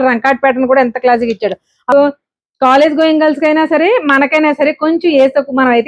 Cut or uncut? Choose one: cut